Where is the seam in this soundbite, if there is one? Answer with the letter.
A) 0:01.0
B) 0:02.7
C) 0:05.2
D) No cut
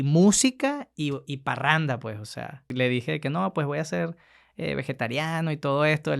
B